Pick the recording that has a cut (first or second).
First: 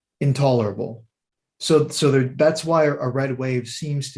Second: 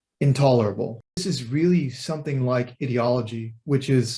second